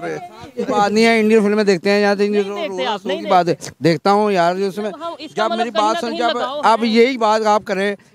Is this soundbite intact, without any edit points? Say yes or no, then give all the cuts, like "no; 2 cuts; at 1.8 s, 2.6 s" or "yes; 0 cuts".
yes; 0 cuts